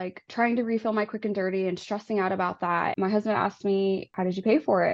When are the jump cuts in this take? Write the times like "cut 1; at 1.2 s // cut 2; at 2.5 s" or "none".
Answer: cut 1; at 2.9 s // cut 2; at 4.1 s